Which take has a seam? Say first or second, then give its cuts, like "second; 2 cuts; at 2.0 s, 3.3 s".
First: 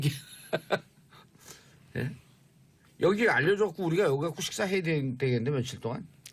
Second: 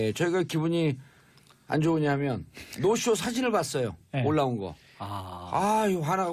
first; 1 cut; at 4.8 s